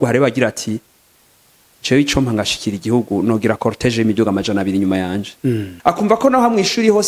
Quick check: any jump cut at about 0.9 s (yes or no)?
no